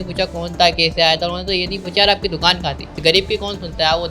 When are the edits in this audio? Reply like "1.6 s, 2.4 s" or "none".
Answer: 2.9 s